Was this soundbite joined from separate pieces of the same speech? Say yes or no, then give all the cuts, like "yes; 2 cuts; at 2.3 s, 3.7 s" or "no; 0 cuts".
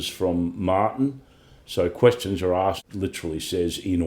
yes; 1 cut; at 2.8 s